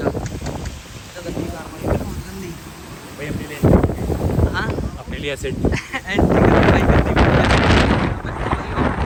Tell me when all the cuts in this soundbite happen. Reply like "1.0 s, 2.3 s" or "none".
none